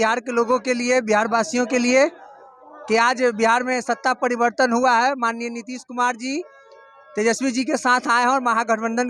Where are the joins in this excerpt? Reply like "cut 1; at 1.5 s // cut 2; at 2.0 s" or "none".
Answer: none